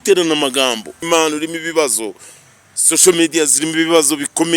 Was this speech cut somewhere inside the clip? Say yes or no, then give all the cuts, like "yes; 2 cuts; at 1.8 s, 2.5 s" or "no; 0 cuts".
yes; 1 cut; at 1.0 s